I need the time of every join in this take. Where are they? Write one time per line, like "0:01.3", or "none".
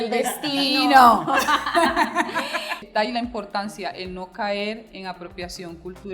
0:02.7